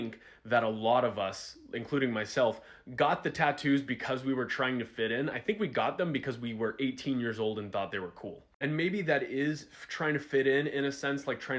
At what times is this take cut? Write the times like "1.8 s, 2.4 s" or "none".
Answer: 9.0 s